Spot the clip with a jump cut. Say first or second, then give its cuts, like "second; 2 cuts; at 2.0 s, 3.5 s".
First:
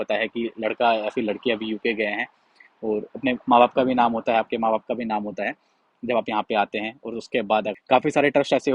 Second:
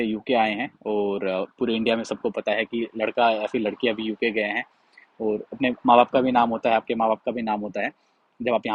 first; 1 cut; at 7.8 s